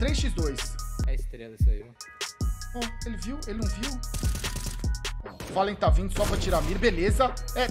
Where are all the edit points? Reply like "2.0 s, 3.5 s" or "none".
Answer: 5.2 s